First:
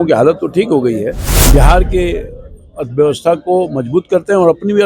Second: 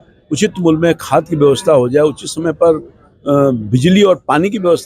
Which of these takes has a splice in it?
first; 1 cut; at 1.3 s

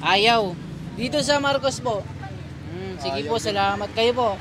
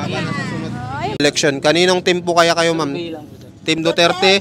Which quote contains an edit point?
second; 1 cut; at 1.2 s

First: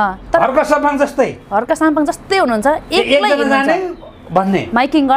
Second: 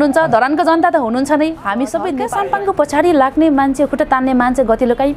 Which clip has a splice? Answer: second; 1 cut; at 2.2 s

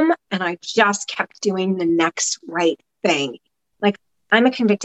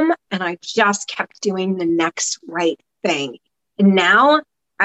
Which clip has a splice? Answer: first; 1 cut; at 3.6 s

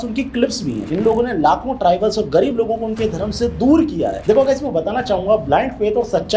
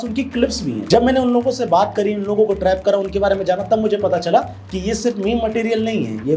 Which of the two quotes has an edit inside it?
first; 2 cuts; at 0.9 s, 4.2 s

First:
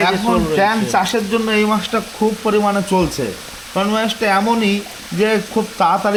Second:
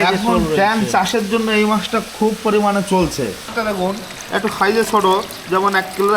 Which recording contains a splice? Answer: second; 1 cut; at 3.5 s

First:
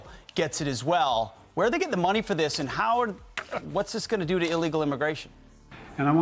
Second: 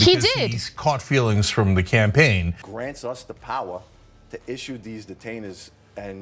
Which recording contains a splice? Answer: second; 1 cut; at 2.5 s

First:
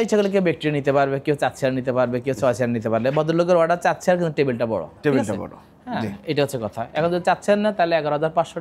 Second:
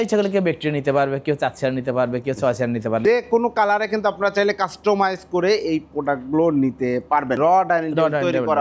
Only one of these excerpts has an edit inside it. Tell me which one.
second; 2 cuts; at 3.0 s, 7.4 s

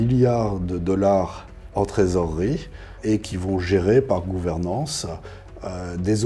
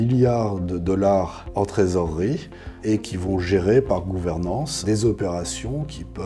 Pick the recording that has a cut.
second; 2 cuts; at 1.4 s, 4.8 s

